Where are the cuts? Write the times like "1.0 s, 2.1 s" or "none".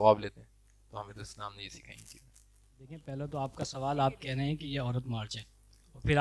2.5 s